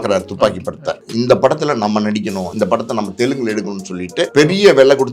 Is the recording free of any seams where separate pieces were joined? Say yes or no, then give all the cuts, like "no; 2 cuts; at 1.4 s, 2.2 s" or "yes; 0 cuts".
no; 3 cuts; at 1.0 s, 2.5 s, 4.3 s